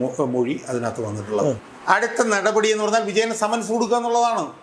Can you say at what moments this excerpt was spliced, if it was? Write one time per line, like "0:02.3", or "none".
0:01.7